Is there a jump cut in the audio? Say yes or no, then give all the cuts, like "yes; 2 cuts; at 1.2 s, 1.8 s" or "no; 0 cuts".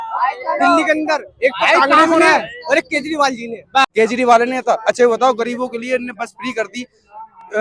yes; 1 cut; at 3.8 s